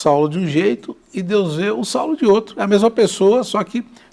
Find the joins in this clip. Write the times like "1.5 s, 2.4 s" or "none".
none